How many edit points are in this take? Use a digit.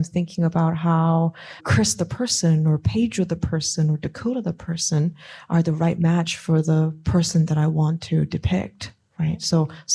1